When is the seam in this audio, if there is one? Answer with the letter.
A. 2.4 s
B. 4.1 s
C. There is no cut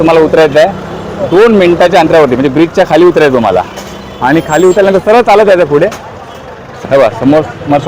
C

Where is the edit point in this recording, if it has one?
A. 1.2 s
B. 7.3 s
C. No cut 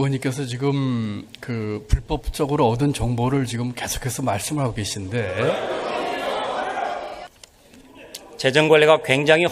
B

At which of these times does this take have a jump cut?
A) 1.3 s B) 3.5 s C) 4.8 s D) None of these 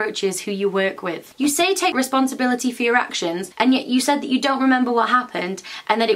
A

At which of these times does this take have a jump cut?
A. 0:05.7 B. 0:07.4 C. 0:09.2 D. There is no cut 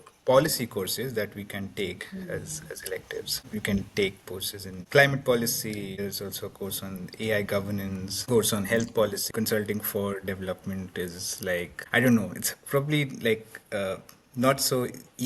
C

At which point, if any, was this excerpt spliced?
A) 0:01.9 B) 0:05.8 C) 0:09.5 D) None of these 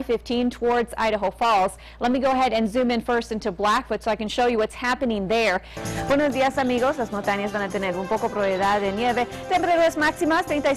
B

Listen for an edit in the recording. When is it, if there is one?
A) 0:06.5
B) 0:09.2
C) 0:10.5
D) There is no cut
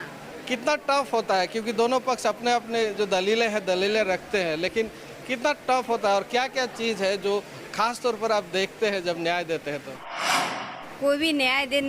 C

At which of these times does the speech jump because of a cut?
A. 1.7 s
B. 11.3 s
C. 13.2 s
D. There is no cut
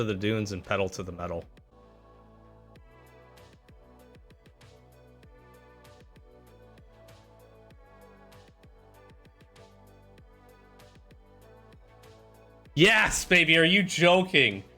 A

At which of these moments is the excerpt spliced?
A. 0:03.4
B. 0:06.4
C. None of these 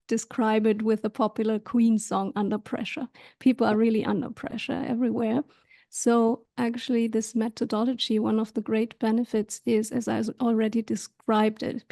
C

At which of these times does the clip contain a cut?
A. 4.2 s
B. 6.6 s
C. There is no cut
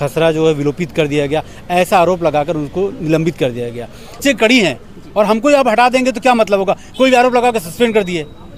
A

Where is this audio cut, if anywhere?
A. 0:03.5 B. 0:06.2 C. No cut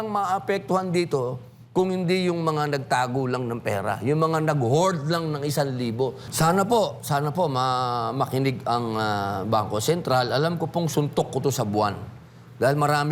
B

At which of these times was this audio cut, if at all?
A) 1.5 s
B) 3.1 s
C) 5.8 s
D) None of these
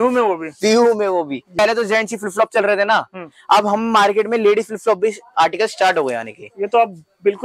A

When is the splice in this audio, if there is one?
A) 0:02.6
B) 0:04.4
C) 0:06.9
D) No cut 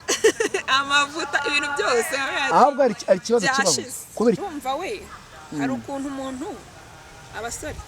B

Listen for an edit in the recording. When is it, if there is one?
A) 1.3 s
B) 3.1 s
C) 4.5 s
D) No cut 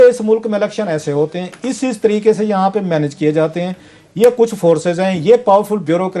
D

